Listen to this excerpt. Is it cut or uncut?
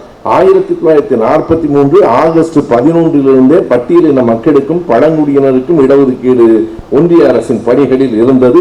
uncut